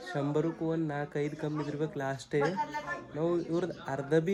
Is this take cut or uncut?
uncut